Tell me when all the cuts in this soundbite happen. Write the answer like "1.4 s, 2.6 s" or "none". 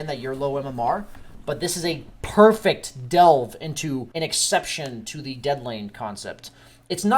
4.1 s